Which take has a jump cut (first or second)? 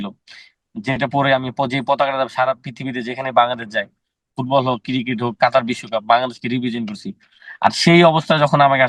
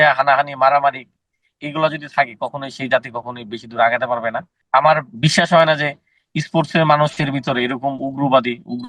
second